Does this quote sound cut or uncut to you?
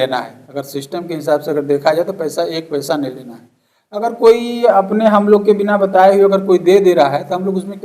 uncut